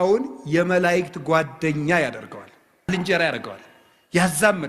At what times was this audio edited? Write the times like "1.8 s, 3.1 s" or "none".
2.9 s